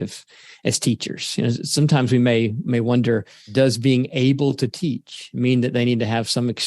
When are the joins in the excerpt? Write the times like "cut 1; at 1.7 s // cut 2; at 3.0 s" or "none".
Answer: cut 1; at 2.6 s // cut 2; at 3.5 s